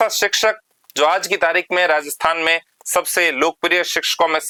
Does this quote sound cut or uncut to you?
uncut